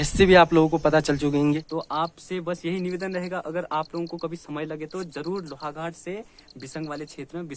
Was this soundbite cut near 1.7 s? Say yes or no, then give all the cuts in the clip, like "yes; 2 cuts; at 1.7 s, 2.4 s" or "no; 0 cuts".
yes; 1 cut; at 1.7 s